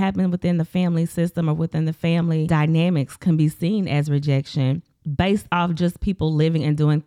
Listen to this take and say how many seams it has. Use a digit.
2